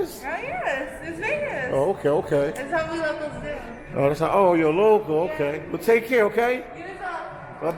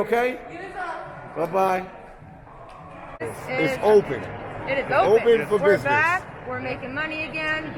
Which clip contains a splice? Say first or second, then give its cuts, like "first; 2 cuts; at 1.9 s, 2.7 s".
second; 1 cut; at 3.3 s